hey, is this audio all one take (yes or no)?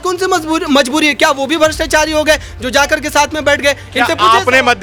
yes